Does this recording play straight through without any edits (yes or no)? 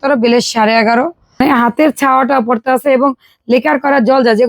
no